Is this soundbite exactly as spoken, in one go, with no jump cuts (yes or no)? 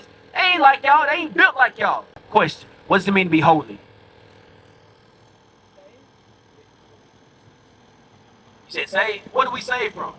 no